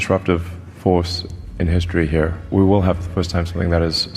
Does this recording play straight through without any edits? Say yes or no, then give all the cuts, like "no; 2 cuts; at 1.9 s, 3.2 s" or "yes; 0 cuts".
no; 1 cut; at 2.4 s